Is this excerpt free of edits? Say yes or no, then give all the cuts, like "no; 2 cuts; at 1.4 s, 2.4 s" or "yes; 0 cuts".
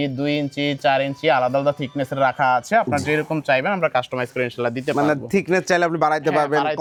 yes; 0 cuts